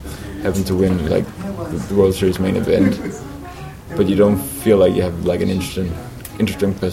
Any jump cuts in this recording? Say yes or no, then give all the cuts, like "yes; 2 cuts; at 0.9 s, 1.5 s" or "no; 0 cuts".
no; 0 cuts